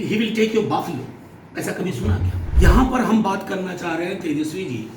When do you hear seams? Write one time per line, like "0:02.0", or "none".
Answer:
0:02.4